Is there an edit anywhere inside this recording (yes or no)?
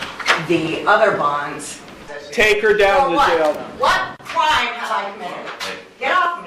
yes